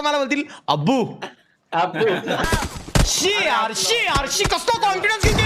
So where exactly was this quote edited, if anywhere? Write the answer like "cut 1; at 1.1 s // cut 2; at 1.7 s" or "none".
cut 1; at 2.5 s